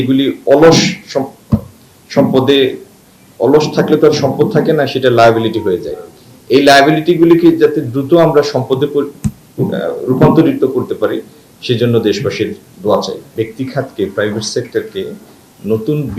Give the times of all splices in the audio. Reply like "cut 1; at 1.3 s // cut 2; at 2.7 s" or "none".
cut 1; at 13.2 s